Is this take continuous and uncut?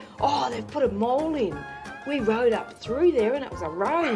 yes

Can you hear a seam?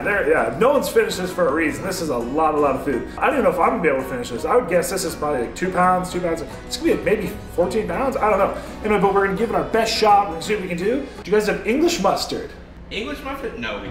yes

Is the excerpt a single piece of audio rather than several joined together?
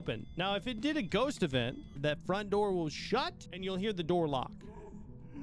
no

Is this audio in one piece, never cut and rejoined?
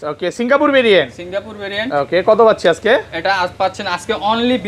yes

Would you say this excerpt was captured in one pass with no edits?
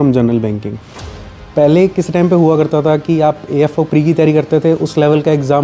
yes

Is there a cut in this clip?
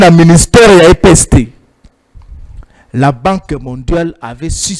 no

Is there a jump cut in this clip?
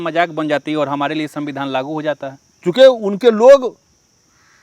no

